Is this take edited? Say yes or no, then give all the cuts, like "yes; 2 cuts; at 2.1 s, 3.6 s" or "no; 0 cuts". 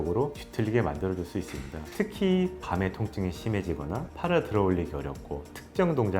yes; 1 cut; at 1.8 s